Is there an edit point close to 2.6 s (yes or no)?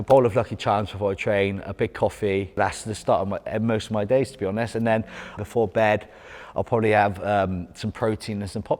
yes